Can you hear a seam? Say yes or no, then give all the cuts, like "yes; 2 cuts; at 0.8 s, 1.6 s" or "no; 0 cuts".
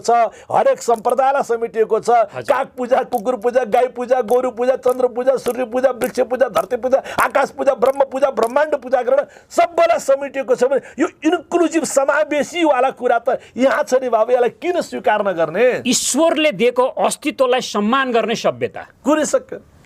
no; 0 cuts